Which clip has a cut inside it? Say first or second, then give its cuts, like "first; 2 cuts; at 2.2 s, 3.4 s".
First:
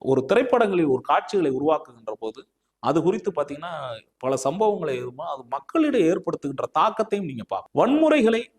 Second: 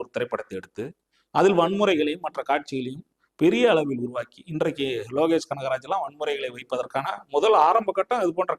first; 1 cut; at 7.7 s